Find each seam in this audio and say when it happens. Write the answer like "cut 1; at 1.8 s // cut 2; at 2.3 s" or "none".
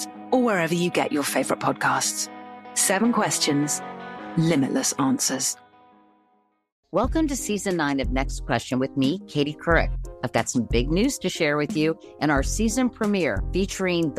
cut 1; at 6.7 s